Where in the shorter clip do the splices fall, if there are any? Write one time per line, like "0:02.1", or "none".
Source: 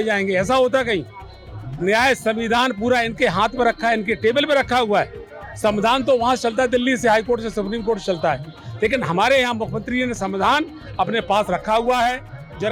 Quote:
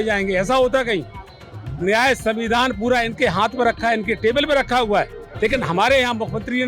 0:05.2

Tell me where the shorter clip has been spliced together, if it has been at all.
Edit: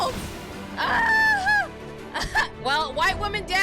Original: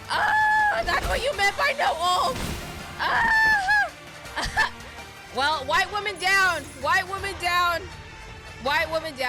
0:02.5

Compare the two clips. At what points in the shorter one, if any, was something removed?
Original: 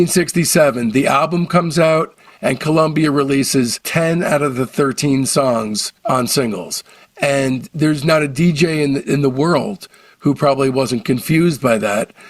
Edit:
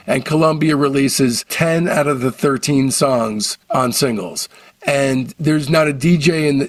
none

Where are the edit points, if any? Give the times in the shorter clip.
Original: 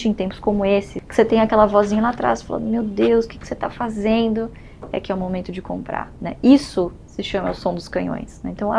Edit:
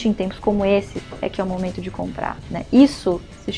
0:01.0

